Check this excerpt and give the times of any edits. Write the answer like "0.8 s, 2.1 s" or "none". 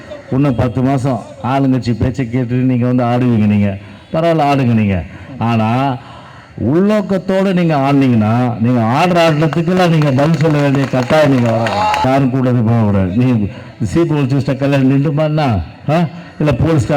12.0 s

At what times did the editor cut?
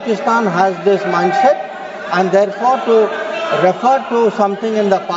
none

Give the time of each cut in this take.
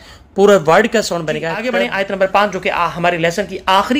1.6 s

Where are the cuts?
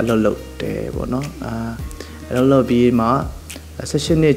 none

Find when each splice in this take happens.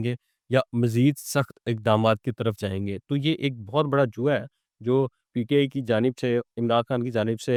none

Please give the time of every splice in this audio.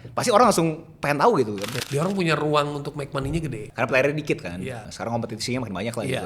1.8 s, 3.6 s, 4.9 s

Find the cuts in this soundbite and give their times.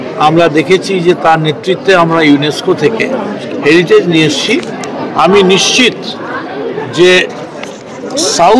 none

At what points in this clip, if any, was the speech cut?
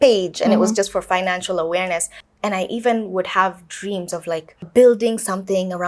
2.2 s, 4.7 s

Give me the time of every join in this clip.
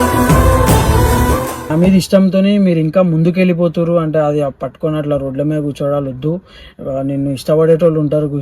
1.6 s

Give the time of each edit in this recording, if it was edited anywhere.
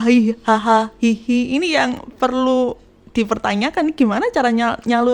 none

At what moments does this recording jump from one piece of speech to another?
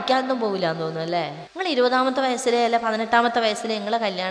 1.4 s

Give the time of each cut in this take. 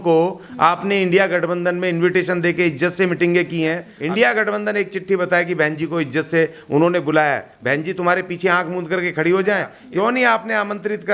3.9 s, 9.8 s

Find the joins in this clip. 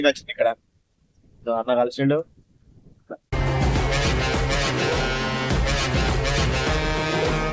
3.3 s

